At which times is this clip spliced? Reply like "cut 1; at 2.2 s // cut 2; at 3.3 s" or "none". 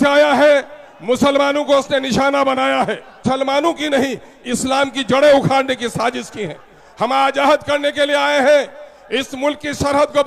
cut 1; at 3.2 s